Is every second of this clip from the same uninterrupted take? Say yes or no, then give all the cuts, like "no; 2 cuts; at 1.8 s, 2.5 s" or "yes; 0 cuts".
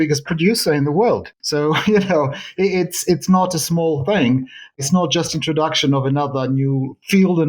no; 1 cut; at 4.8 s